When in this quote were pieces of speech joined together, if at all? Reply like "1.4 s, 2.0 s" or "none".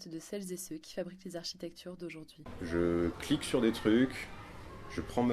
2.4 s